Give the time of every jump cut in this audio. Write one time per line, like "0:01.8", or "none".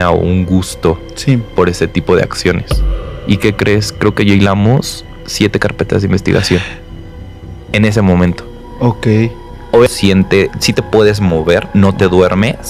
0:03.1
0:09.9